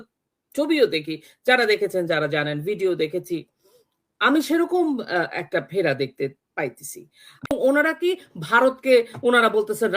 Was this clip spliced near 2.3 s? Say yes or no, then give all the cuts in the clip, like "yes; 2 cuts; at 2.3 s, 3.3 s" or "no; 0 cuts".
no; 1 cut; at 7.5 s